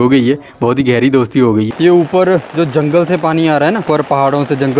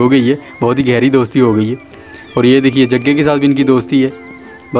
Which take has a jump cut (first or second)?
first